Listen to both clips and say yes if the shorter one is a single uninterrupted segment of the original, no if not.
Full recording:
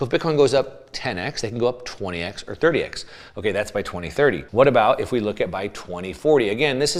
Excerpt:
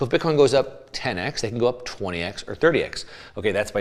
yes